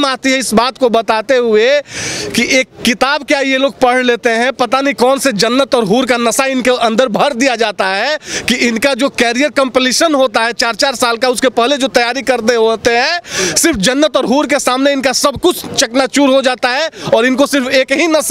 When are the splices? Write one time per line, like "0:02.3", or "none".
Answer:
none